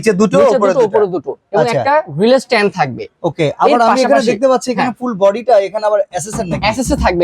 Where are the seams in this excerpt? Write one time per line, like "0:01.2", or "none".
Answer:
none